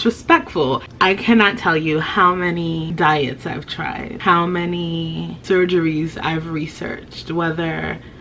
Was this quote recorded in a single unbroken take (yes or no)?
no